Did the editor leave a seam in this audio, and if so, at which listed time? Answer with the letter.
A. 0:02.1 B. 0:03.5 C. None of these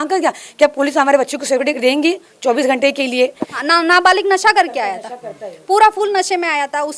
B